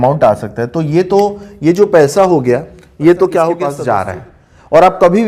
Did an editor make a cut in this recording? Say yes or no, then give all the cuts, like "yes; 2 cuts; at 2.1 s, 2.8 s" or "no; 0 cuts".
yes; 1 cut; at 3.7 s